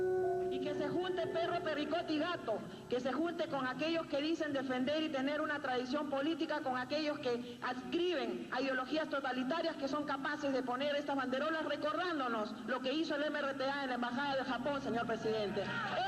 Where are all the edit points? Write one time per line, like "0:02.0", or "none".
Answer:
none